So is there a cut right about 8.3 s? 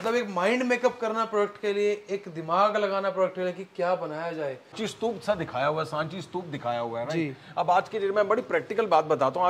no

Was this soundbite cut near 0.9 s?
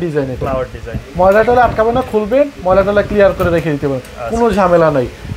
no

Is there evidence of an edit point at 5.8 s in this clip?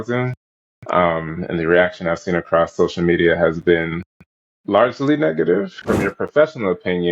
yes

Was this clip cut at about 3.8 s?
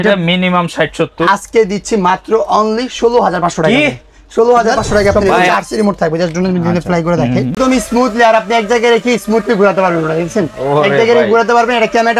no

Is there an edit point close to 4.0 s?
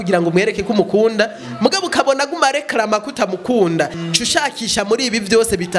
yes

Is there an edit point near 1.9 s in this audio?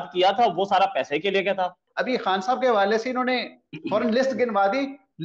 yes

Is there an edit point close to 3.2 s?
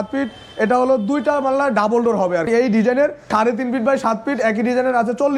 yes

